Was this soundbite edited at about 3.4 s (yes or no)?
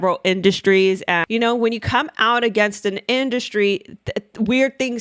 no